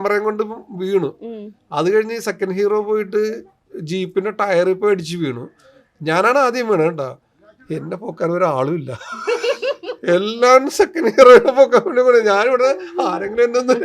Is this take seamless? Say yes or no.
yes